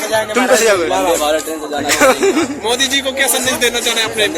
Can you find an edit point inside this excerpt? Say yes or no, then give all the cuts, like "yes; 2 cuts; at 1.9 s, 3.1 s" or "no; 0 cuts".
no; 0 cuts